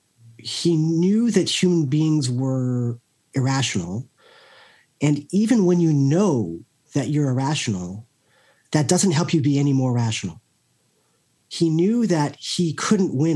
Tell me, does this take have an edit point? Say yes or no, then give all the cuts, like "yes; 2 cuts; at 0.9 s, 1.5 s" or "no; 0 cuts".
no; 0 cuts